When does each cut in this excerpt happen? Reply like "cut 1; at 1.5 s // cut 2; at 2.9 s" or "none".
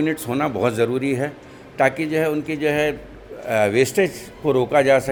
none